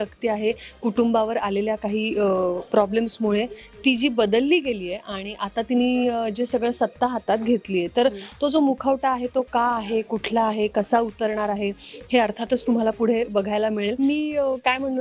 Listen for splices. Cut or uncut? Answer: cut